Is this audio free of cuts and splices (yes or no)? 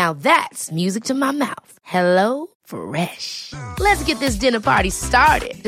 yes